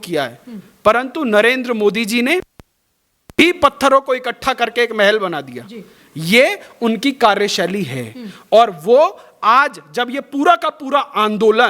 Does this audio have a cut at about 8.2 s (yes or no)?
no